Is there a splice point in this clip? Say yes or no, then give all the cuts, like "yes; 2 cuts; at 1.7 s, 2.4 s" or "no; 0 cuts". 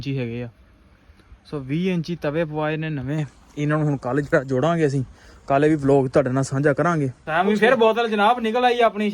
yes; 1 cut; at 7.2 s